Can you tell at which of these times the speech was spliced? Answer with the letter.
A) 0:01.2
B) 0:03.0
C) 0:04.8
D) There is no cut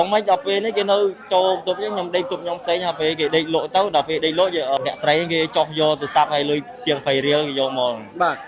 C